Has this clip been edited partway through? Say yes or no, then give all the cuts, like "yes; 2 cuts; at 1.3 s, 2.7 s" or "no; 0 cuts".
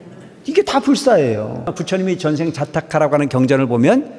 yes; 1 cut; at 1.7 s